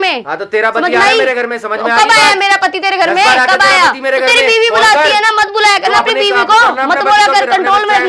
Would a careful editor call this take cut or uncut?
uncut